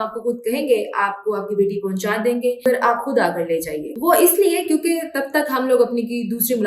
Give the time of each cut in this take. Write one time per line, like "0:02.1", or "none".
0:02.6